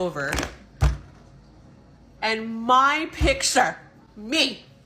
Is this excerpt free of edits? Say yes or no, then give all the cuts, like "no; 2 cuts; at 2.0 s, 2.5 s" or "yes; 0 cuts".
yes; 0 cuts